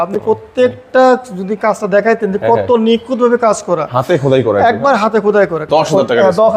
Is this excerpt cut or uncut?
cut